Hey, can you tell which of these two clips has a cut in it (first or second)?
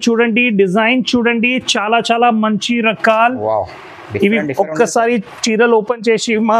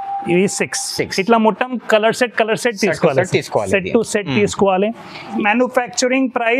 second